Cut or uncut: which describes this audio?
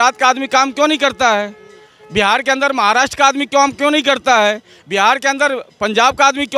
uncut